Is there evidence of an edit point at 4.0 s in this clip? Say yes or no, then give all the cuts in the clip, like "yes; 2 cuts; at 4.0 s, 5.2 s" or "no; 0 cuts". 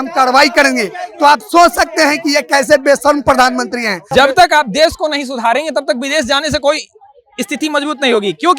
yes; 1 cut; at 4.0 s